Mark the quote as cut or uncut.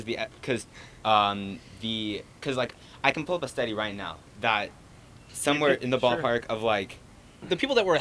uncut